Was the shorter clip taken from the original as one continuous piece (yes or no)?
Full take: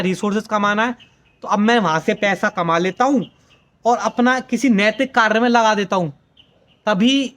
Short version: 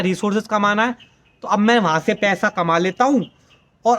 yes